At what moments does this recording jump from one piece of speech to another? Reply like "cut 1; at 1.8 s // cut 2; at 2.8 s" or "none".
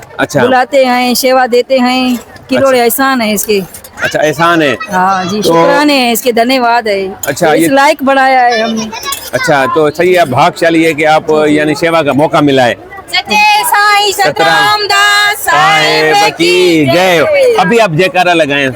none